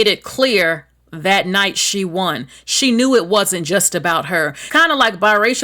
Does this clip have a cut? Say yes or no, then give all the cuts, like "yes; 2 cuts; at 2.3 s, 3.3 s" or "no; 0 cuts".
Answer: yes; 1 cut; at 4.6 s